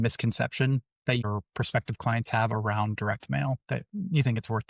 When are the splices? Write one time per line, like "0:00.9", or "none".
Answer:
0:01.2

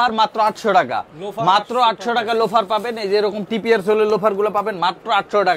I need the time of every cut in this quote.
none

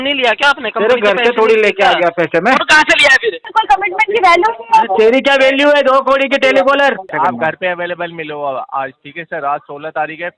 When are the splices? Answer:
0:03.4
0:07.1

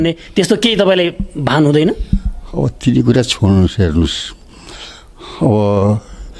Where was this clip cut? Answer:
none

